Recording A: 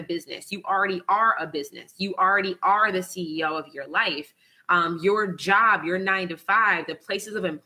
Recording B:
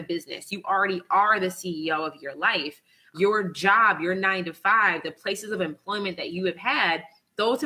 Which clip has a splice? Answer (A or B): B